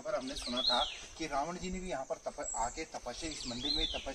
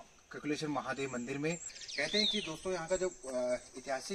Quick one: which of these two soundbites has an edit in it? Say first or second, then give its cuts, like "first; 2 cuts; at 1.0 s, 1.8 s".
second; 1 cut; at 1.8 s